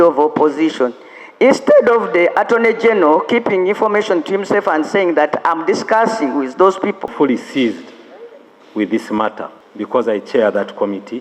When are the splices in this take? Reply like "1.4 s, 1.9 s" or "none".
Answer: 7.1 s